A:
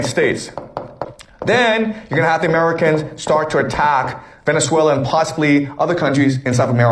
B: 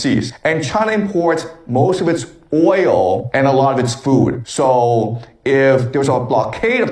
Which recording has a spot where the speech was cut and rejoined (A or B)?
A